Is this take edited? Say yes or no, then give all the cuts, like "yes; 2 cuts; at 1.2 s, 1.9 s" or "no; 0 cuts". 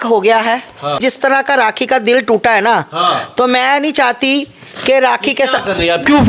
yes; 1 cut; at 1.0 s